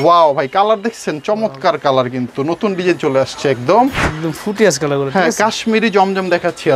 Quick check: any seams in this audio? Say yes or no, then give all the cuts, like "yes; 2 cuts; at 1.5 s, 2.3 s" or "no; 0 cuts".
no; 0 cuts